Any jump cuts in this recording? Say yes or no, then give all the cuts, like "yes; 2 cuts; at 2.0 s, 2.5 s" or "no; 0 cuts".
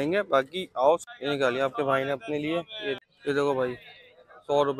yes; 2 cuts; at 1.1 s, 3.0 s